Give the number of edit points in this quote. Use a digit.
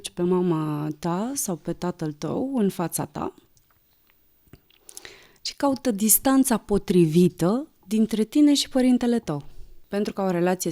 1